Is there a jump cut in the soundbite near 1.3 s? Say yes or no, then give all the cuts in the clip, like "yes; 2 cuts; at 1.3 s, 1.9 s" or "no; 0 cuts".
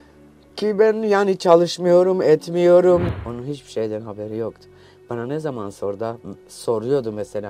no; 1 cut; at 3.1 s